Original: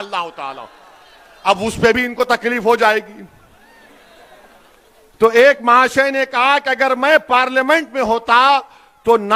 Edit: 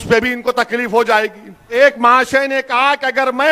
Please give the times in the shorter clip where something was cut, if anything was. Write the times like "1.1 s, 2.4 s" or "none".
1.7 s